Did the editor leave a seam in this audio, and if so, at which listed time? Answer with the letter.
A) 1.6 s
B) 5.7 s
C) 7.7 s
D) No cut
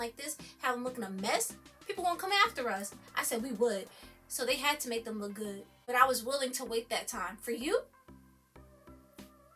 B